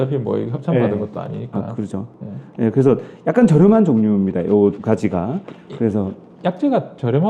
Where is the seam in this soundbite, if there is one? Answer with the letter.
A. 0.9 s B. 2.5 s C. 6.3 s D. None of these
D